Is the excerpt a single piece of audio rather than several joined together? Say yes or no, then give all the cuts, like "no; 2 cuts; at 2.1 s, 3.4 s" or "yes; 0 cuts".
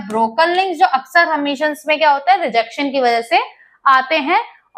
yes; 0 cuts